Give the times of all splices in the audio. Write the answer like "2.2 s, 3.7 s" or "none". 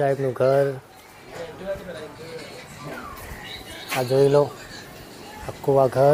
none

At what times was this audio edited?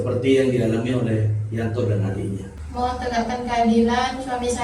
2.6 s

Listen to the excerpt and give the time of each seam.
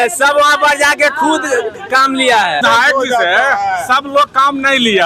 2.6 s

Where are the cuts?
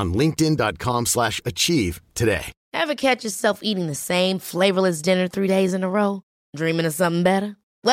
2.6 s

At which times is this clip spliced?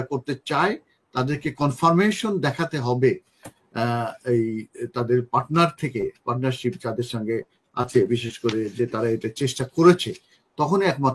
none

